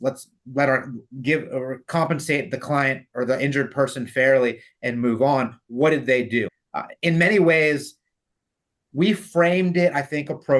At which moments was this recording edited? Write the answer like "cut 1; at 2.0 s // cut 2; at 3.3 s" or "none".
cut 1; at 6.5 s

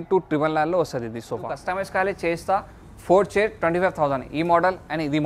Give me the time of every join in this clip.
cut 1; at 1.6 s

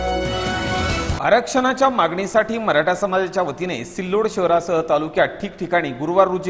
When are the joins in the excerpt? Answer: cut 1; at 1.0 s

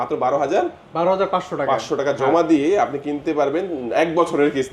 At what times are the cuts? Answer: none

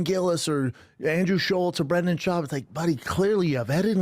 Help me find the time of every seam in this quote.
cut 1; at 1.5 s

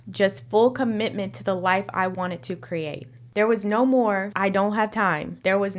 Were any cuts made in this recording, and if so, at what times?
cut 1; at 3.1 s

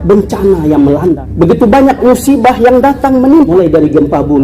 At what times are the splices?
cut 1; at 1.2 s // cut 2; at 3.5 s

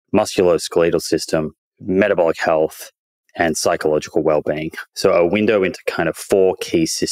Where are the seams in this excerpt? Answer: none

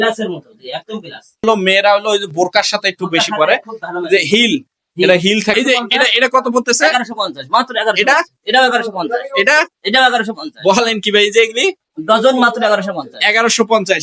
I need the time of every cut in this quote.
cut 1; at 1.4 s // cut 2; at 5.6 s

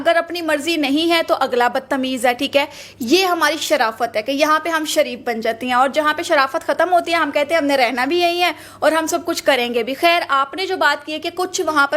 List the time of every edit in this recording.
none

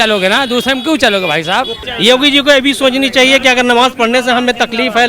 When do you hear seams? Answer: cut 1; at 1.8 s

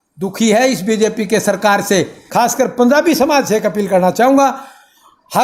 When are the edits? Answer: cut 1; at 2.2 s

